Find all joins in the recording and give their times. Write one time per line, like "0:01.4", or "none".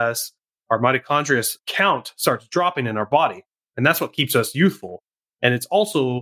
0:01.5